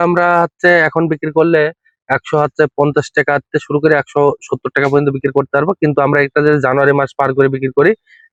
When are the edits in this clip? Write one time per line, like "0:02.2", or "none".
none